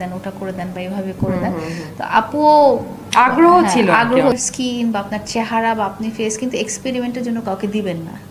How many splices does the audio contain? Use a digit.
1